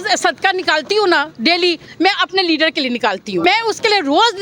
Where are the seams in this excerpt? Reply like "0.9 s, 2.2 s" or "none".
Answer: 3.4 s